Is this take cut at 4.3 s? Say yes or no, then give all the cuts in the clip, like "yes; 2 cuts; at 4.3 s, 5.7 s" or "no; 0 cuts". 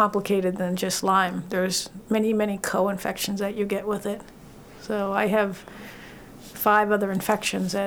no; 0 cuts